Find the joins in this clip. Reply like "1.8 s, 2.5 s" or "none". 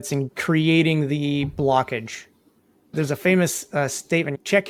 none